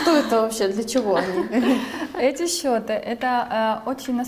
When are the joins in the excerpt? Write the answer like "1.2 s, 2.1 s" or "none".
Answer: none